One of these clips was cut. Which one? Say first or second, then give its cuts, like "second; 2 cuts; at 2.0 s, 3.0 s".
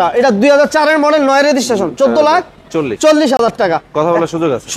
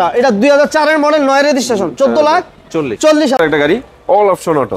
second; 1 cut; at 3.4 s